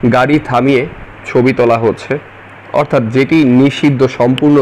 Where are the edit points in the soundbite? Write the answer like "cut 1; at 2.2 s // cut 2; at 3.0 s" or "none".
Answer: none